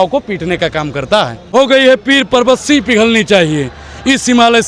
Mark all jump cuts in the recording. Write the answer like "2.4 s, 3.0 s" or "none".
1.4 s